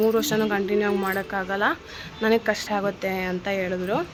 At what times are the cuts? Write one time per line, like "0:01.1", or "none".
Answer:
none